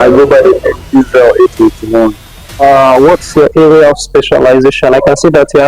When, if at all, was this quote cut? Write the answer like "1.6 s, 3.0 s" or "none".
2.6 s

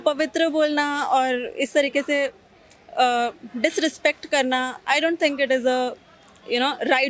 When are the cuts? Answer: none

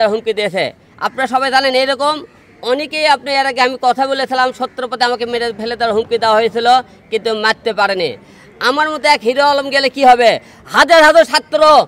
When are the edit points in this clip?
none

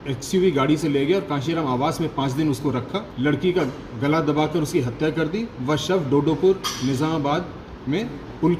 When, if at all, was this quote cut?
3.0 s

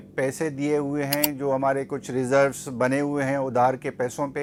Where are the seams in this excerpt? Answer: none

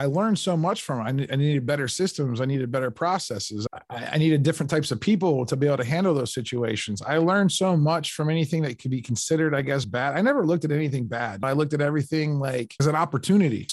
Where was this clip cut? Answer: 3.6 s

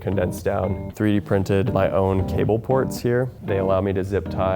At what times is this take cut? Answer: 0.9 s

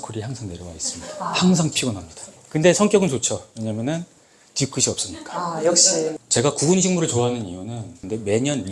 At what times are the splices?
2.4 s, 6.2 s

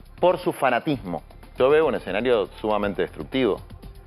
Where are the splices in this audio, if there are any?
1.4 s

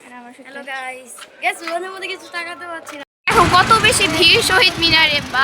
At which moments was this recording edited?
3.1 s

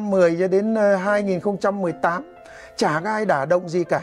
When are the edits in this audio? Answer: none

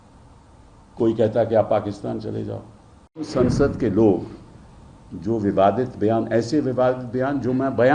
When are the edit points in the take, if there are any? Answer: 3.3 s

